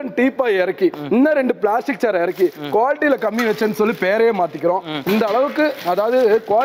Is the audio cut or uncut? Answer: uncut